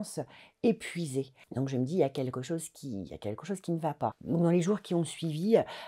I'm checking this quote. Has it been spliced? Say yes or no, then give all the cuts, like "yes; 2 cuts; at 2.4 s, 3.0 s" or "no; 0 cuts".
yes; 2 cuts; at 1.4 s, 4.2 s